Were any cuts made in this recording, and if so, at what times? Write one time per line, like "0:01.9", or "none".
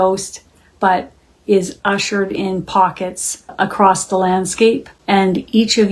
0:03.5
0:04.9